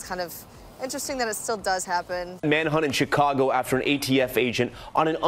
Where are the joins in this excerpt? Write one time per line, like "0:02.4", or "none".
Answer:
0:02.3